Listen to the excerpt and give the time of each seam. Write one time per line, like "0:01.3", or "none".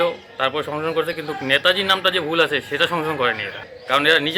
none